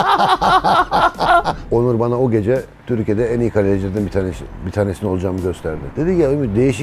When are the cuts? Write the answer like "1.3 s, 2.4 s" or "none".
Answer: 1.6 s, 2.7 s, 5.8 s